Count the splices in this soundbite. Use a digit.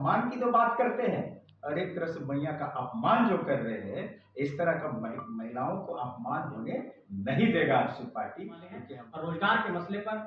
1